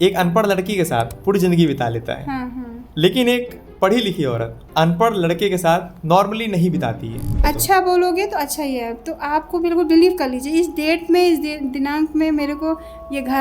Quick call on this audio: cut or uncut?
cut